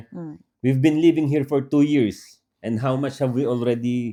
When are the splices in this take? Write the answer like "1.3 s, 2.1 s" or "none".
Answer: none